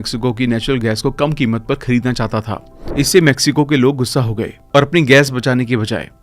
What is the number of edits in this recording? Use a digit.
1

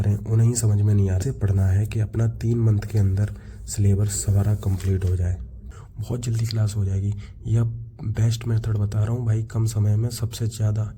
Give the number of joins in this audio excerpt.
2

